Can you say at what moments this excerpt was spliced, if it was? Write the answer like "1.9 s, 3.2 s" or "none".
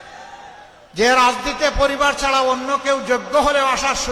none